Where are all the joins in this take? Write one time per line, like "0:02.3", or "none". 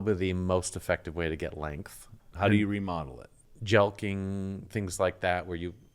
0:02.2
0:03.4